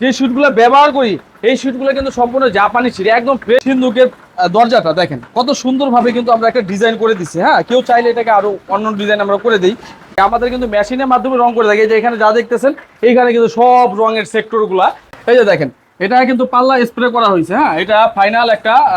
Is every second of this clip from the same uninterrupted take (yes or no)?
no